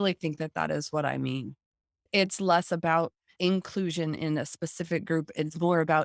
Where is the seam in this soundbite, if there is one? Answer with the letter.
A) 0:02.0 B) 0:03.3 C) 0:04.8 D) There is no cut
B